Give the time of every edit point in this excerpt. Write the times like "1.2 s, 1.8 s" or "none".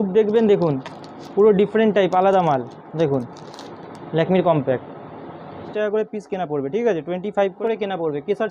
5.6 s, 7.6 s